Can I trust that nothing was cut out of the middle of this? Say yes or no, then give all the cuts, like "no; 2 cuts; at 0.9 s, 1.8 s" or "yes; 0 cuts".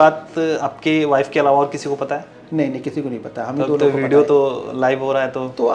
yes; 0 cuts